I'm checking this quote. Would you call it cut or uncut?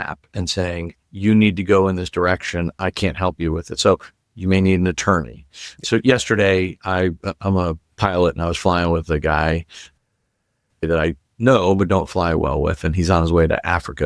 cut